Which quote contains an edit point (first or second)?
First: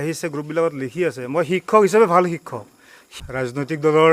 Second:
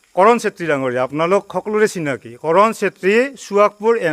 first